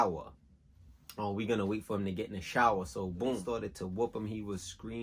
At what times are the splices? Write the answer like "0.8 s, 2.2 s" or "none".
3.4 s